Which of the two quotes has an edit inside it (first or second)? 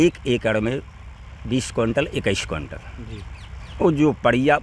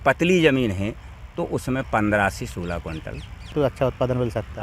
second